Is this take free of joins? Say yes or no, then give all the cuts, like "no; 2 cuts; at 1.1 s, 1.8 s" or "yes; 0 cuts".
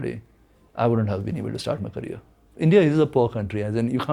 no; 1 cut; at 2.5 s